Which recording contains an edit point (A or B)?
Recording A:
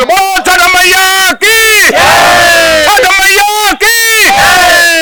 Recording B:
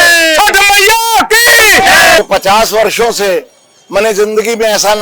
B